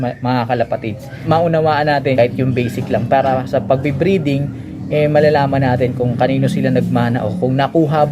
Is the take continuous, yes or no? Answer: no